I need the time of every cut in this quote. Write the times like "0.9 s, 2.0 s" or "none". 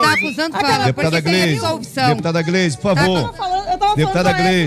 none